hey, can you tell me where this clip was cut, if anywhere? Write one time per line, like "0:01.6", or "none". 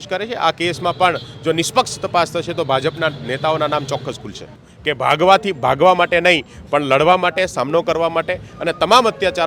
0:04.7